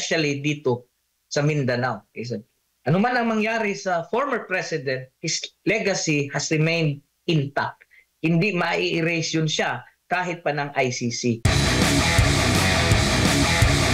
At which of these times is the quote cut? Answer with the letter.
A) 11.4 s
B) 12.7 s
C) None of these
A